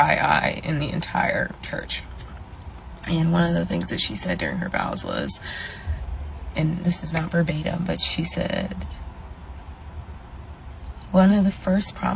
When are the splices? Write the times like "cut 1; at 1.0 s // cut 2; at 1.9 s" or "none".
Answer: none